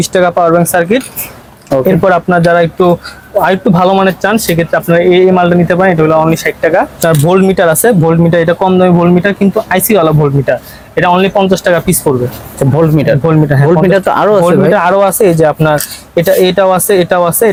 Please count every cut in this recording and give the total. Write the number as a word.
zero